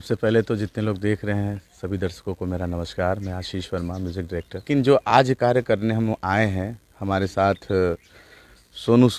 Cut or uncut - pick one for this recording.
cut